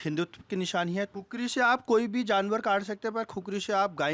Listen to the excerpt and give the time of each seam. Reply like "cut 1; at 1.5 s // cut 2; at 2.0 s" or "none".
cut 1; at 1.1 s

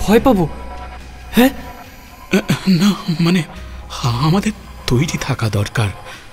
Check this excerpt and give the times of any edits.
cut 1; at 1.0 s // cut 2; at 2.2 s // cut 3; at 3.6 s // cut 4; at 4.7 s

